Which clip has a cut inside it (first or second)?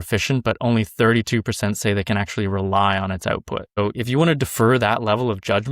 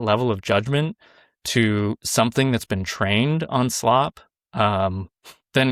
first